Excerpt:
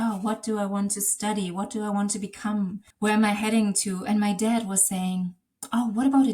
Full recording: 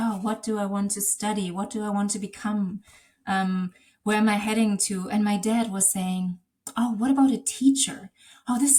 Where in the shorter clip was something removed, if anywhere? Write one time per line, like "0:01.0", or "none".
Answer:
0:02.8